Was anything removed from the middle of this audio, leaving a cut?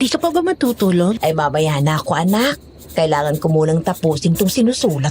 yes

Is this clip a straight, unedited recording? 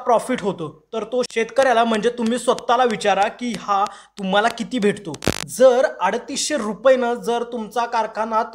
yes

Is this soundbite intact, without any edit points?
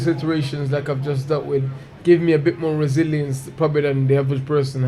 yes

